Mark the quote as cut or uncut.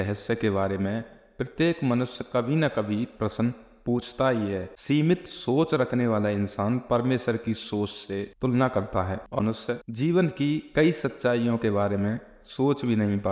cut